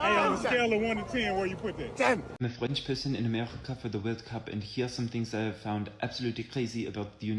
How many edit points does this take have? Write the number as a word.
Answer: one